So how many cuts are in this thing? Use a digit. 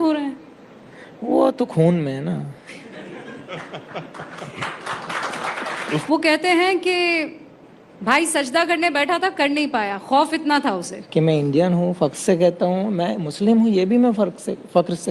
2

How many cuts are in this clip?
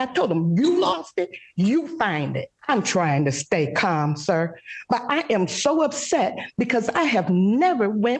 1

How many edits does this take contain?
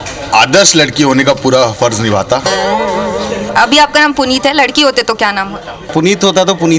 2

